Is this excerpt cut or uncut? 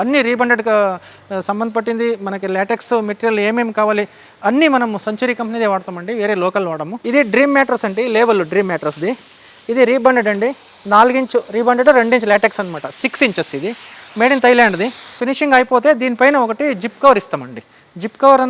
cut